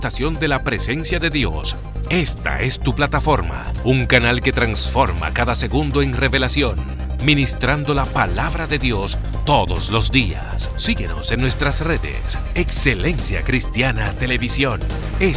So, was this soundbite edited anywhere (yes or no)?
no